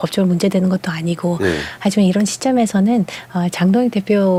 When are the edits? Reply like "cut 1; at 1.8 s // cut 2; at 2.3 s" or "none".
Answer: none